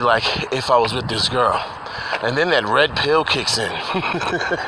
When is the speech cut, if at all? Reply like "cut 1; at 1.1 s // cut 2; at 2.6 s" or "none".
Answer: none